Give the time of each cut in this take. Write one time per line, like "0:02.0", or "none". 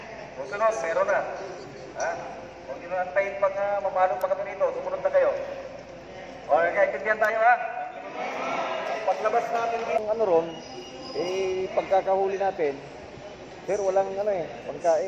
0:10.0